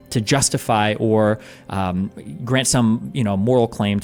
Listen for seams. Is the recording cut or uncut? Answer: uncut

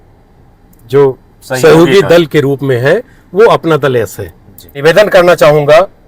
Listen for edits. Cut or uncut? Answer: cut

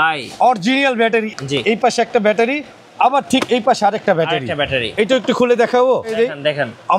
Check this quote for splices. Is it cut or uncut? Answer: cut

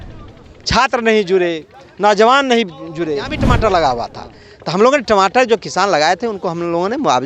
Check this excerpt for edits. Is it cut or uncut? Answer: cut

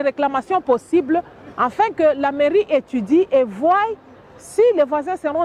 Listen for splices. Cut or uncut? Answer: uncut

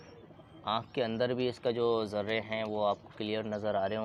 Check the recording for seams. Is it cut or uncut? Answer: uncut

